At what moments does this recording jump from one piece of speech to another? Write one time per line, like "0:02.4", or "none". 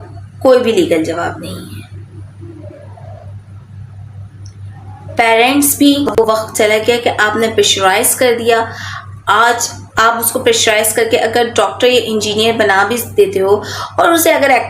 0:06.2